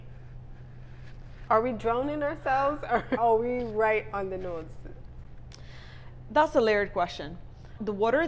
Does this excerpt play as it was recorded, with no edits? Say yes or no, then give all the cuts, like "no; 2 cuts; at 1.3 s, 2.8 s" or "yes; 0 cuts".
no; 1 cut; at 3.2 s